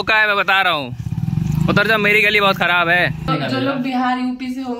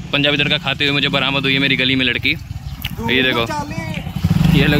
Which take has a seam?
first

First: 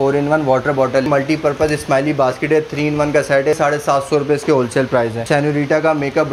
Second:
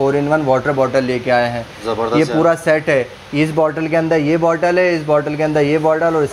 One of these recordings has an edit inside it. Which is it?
first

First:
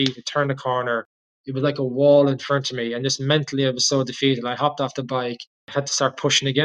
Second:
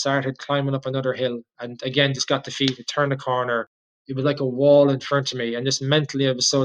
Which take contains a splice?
first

